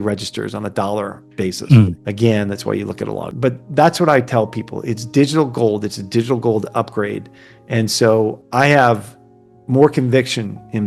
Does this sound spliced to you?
yes; 3 cuts; at 2.0 s, 3.3 s, 8.4 s

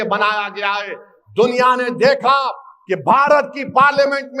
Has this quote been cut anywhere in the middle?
no; 0 cuts

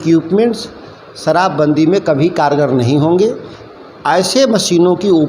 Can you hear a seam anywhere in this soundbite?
no; 0 cuts

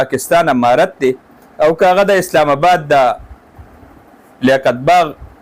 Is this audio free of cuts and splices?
yes; 0 cuts

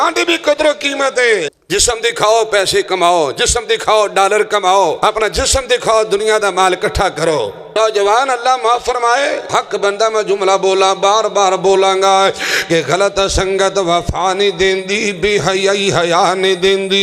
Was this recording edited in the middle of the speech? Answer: yes; 4 cuts; at 1.6 s, 5.0 s, 7.7 s, 9.5 s

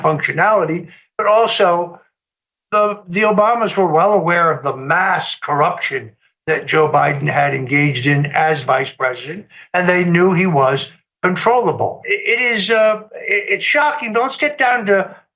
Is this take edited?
yes; 1 cut; at 12.1 s

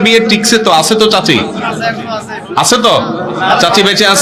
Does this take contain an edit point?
no; 0 cuts

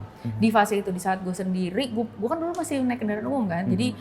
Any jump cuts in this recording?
no; 0 cuts

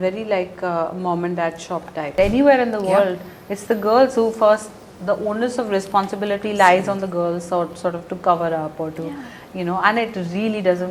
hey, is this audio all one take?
no; 1 cut; at 2.1 s

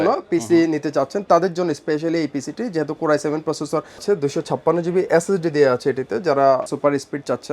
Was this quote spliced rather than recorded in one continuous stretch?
yes; 2 cuts; at 4.0 s, 6.6 s

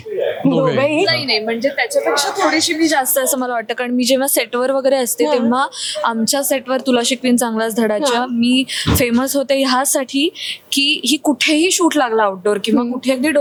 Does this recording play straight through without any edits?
yes; 0 cuts

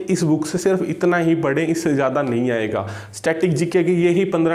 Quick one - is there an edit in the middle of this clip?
no; 0 cuts

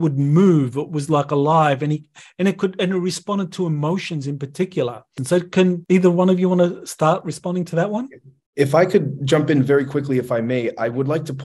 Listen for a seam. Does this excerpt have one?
yes; 2 cuts; at 5.2 s, 5.8 s

